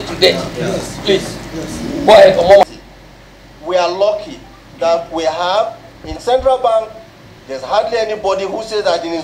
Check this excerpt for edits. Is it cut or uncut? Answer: cut